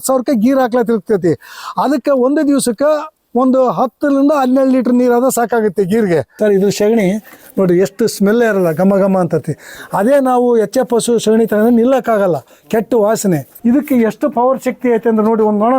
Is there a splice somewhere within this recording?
yes; 2 cuts; at 6.4 s, 13.5 s

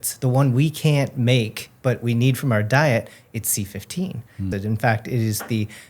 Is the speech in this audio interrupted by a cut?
yes; 1 cut; at 4.5 s

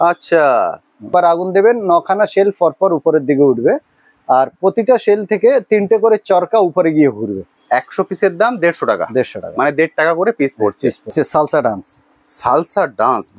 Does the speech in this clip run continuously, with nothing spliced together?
no; 3 cuts; at 1.1 s, 7.5 s, 11.1 s

